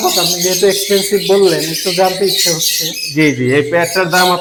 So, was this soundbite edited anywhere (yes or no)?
no